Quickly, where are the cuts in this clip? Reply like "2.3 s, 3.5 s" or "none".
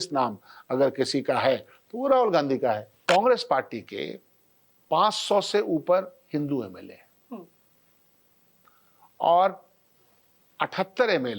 2.9 s